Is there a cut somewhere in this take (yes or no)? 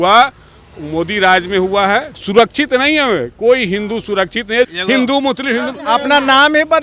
yes